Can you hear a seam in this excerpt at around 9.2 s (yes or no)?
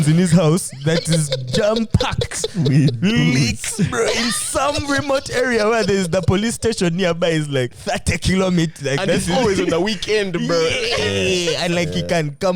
no